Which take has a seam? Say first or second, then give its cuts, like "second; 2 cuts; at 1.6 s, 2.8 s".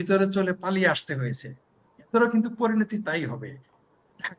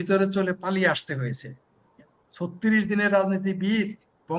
second; 1 cut; at 2.0 s